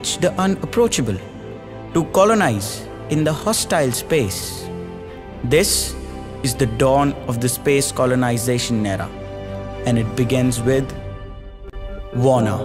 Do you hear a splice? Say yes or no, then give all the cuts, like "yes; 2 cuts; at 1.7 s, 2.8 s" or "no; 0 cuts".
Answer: no; 0 cuts